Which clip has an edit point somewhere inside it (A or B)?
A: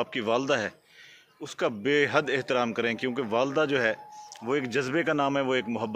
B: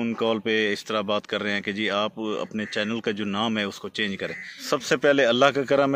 B